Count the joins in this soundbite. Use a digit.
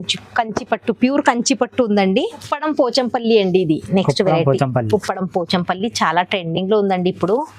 1